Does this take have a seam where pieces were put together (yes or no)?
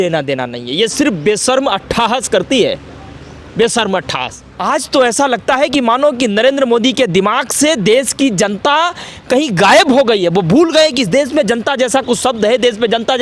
yes